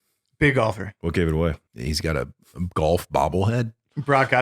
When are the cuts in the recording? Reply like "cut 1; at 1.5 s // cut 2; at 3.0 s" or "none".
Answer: cut 1; at 0.9 s // cut 2; at 1.7 s